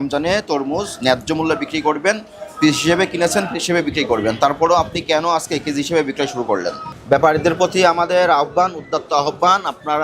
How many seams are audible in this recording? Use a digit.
1